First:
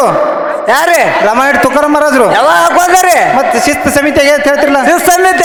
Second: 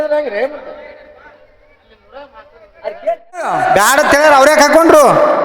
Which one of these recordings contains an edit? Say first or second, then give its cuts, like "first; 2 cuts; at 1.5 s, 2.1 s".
second; 1 cut; at 3.5 s